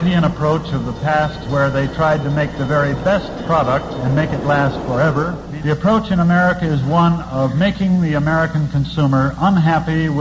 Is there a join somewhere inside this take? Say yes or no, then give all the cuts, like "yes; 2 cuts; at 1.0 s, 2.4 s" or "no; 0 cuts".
yes; 1 cut; at 5.4 s